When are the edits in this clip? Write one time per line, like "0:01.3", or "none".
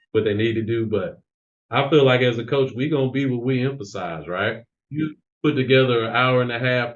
0:04.7